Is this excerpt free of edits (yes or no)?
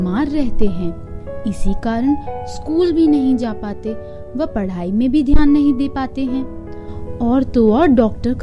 yes